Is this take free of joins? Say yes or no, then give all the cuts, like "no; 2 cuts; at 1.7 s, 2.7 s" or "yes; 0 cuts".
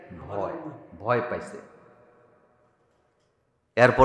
yes; 0 cuts